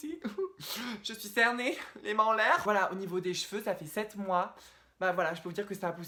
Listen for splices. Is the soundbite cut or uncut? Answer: uncut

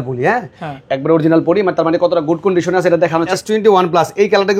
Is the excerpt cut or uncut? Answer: cut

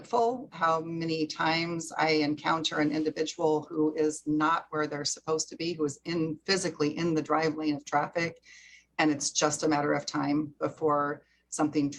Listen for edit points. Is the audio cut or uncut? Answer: uncut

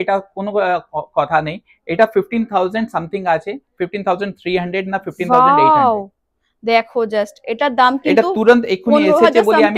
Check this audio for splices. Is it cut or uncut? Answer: uncut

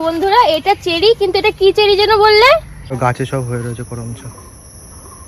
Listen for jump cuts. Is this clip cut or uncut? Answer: cut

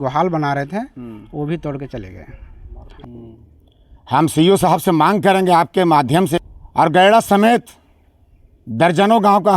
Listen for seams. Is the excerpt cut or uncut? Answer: cut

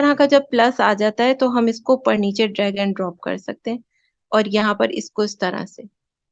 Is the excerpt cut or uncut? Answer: uncut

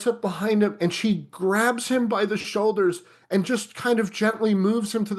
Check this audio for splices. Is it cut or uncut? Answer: uncut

